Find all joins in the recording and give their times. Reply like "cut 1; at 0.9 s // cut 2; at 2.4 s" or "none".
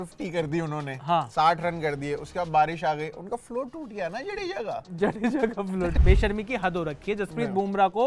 cut 1; at 5.9 s